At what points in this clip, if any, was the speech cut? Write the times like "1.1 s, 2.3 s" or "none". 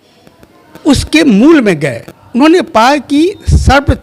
none

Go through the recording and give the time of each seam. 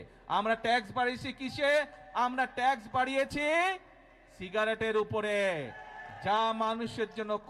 none

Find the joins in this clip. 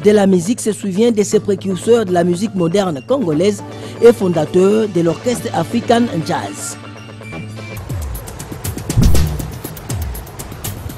6.5 s, 7.8 s

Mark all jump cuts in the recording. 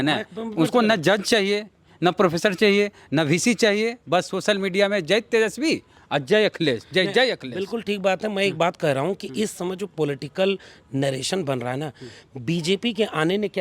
none

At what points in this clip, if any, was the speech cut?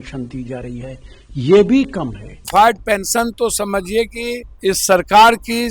2.4 s, 4.5 s

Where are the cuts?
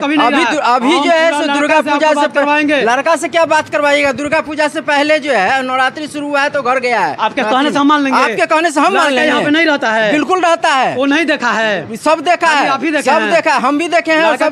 none

